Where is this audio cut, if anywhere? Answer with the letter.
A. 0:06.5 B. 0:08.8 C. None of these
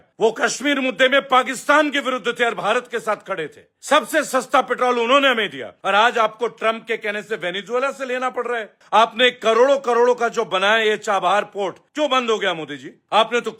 C